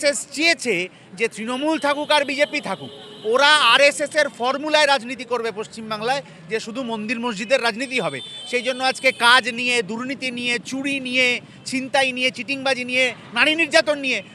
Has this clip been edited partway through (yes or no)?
no